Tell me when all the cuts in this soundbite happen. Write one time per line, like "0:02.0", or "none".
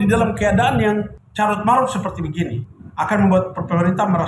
0:02.6